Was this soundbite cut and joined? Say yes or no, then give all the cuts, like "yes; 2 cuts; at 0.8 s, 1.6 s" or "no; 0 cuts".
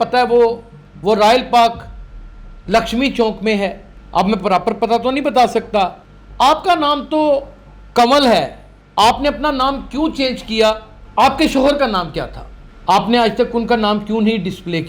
yes; 1 cut; at 11.0 s